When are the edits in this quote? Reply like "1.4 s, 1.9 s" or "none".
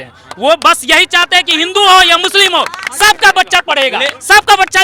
none